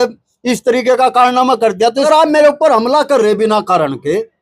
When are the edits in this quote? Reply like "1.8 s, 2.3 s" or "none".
2.1 s